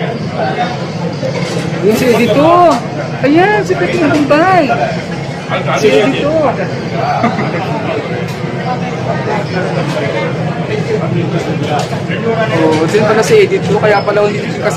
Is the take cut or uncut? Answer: uncut